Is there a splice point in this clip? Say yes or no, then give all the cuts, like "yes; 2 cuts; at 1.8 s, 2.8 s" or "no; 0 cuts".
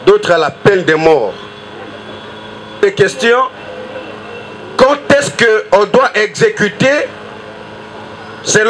yes; 1 cut; at 2.8 s